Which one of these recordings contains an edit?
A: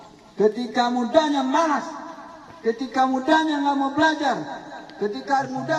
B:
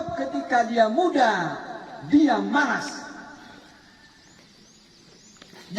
B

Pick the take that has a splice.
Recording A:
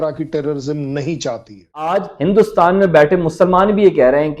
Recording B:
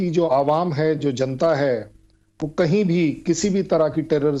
A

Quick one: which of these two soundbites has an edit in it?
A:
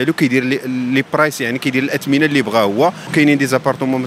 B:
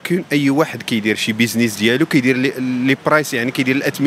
A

